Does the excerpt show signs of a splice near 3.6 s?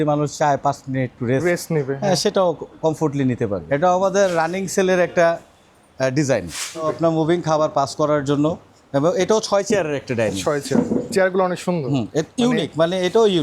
yes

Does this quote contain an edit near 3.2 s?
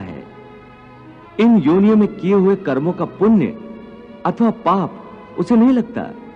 no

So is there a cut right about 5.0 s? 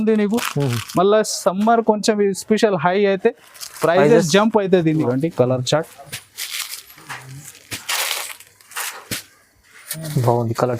yes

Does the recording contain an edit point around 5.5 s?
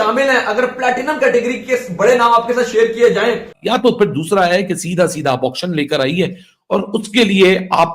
no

